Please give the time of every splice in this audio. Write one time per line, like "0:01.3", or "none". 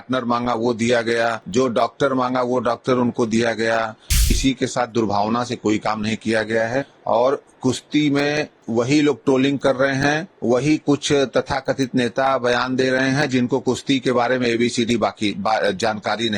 0:01.4
0:04.4
0:06.9
0:08.6
0:10.3